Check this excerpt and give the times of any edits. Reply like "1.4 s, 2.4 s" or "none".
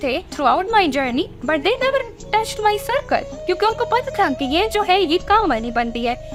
none

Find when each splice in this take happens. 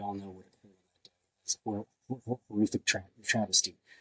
none

